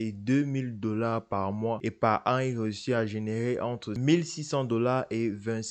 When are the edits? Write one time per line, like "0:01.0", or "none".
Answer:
0:01.9

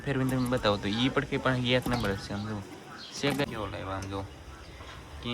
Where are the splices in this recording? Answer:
0:03.5

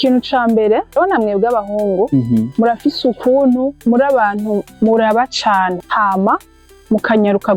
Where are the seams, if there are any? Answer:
0:01.0
0:02.5
0:03.8
0:05.8

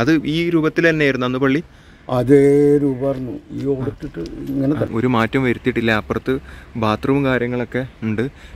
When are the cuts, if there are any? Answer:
0:04.9

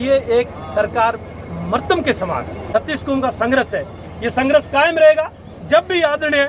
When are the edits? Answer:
0:02.6

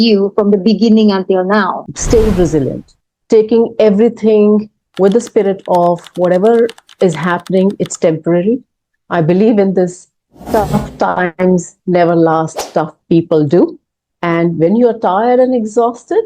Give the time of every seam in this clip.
0:01.8

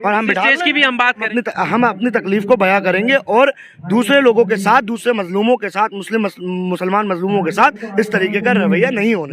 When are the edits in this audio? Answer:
0:01.3

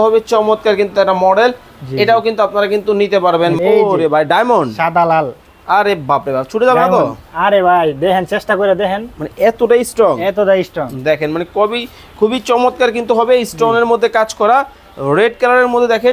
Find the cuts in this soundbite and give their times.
0:03.6

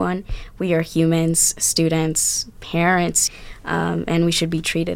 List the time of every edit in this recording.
0:03.2

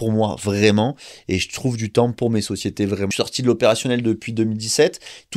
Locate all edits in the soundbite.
0:03.1

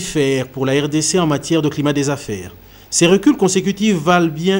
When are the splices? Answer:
none

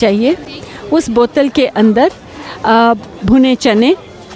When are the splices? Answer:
none

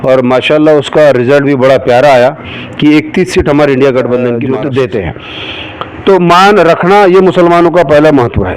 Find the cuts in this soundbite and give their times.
0:04.4

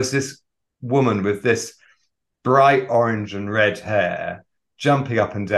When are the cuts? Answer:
none

